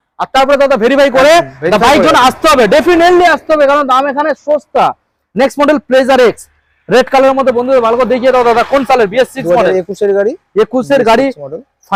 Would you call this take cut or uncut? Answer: uncut